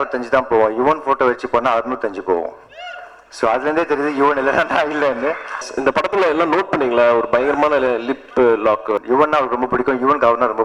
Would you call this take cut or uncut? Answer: cut